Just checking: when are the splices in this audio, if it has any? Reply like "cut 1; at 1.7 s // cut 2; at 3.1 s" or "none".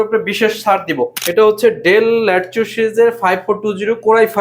cut 1; at 1.2 s